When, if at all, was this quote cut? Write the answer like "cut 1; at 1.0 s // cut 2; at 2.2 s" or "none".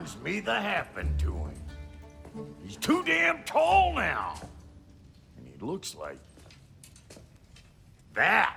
none